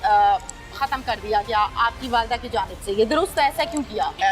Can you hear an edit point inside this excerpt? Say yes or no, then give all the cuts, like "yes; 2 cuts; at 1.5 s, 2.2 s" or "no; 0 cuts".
no; 0 cuts